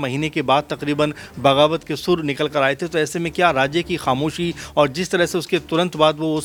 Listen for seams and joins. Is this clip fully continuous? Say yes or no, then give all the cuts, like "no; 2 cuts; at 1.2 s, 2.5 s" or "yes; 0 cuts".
yes; 0 cuts